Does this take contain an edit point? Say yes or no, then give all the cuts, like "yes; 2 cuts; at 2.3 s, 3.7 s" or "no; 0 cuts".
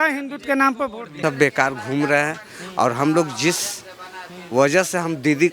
yes; 1 cut; at 1.2 s